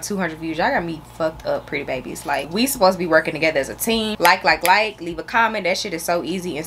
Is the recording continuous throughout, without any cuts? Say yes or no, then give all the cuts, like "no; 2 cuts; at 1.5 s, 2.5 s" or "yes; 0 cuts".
yes; 0 cuts